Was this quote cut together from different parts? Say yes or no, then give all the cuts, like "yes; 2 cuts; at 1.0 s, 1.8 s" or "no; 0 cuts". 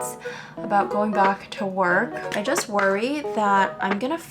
yes; 1 cut; at 2.2 s